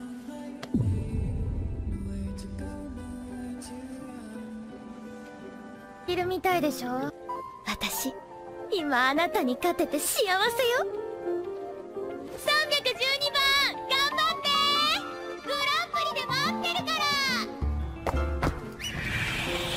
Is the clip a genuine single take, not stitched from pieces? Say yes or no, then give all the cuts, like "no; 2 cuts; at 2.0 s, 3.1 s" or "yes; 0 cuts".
yes; 0 cuts